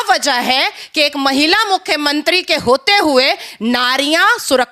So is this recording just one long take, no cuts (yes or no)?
yes